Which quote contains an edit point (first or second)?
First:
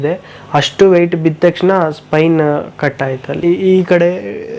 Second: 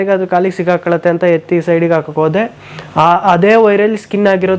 first